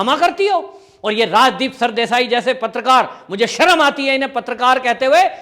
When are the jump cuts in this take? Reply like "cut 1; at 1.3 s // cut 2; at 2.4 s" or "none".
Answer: none